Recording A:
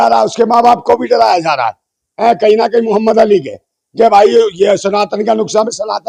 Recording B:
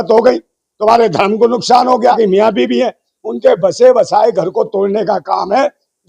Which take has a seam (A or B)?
B